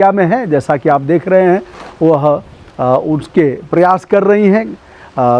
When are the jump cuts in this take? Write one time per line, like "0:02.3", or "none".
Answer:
none